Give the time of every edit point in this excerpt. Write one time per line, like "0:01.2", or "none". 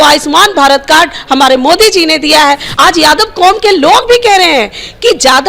0:02.7